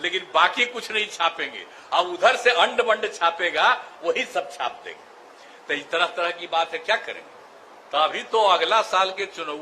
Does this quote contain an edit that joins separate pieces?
no; 0 cuts

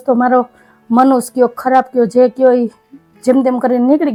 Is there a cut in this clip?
no; 0 cuts

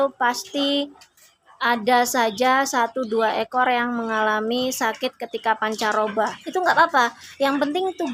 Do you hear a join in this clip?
no; 0 cuts

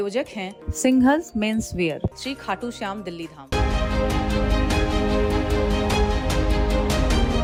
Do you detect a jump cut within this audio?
no; 0 cuts

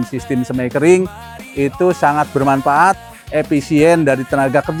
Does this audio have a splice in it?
no; 0 cuts

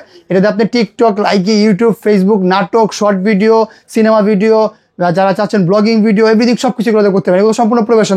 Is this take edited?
no; 0 cuts

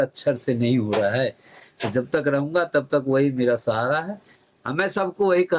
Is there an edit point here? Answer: no; 0 cuts

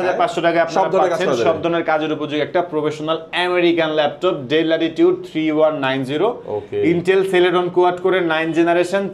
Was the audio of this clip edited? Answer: no; 0 cuts

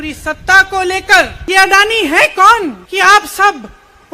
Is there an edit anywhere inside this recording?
yes; 2 cuts; at 1.4 s, 2.8 s

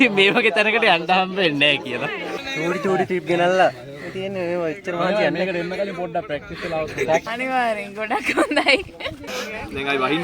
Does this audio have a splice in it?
yes; 3 cuts; at 2.4 s, 7.3 s, 9.3 s

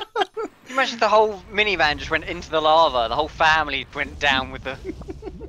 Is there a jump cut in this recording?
no; 0 cuts

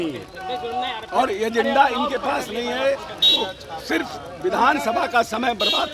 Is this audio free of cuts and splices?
yes; 0 cuts

